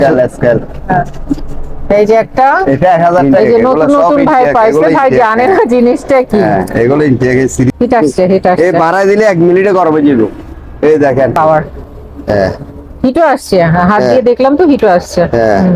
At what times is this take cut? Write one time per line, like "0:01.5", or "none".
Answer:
0:03.2
0:07.7
0:11.4